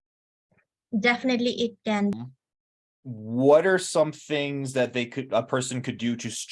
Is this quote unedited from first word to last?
no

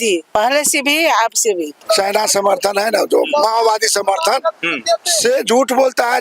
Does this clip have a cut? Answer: yes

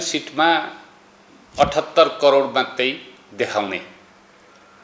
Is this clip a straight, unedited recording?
yes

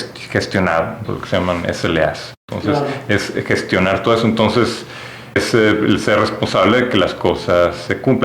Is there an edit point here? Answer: yes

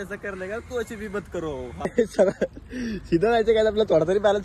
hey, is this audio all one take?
no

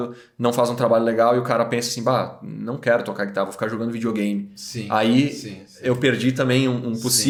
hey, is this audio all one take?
yes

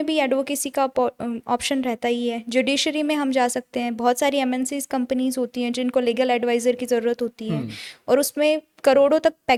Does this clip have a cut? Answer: no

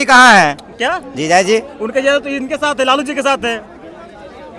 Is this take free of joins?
yes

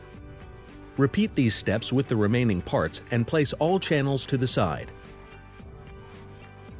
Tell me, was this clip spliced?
yes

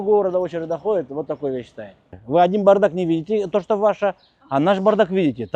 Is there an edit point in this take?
yes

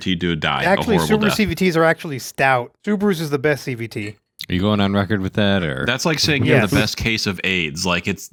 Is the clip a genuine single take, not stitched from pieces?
yes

